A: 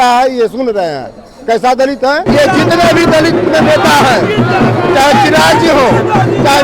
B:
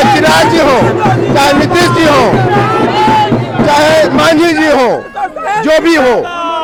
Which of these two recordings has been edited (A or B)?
A